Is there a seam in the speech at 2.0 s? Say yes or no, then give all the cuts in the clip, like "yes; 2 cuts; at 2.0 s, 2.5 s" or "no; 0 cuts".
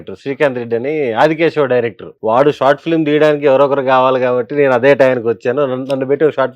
yes; 1 cut; at 2.0 s